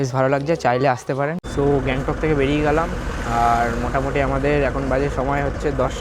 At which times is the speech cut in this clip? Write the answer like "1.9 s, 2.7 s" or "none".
1.4 s